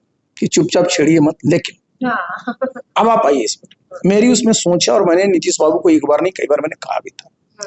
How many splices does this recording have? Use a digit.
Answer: 0